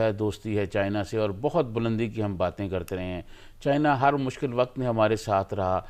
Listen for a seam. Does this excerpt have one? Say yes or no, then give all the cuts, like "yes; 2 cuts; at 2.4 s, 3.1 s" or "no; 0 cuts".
no; 0 cuts